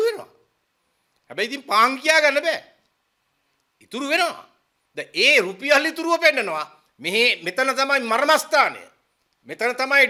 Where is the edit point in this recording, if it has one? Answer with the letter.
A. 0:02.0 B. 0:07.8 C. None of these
C